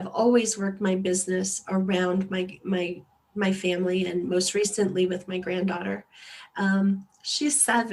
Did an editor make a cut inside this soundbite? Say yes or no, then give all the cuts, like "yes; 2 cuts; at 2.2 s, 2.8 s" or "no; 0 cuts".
no; 0 cuts